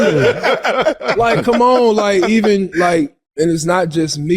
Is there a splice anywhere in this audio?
yes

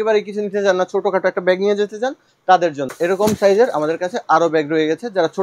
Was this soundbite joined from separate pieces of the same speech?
yes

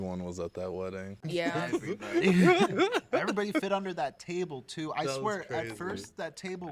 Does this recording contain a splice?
yes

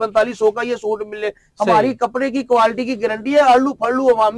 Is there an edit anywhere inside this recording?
yes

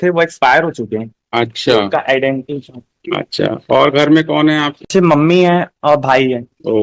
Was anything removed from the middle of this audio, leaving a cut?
no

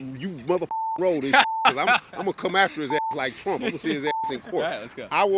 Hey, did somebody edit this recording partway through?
no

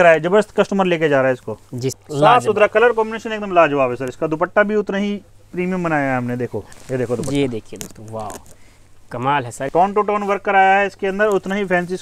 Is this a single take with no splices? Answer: no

